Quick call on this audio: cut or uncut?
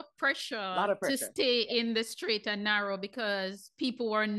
uncut